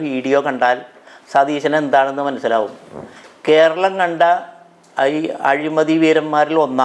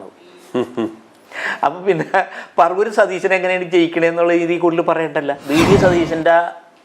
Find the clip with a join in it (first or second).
second